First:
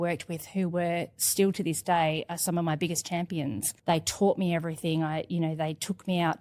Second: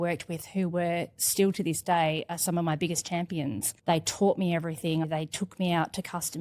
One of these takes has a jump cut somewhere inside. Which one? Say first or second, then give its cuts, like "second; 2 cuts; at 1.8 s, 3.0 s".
second; 1 cut; at 5.1 s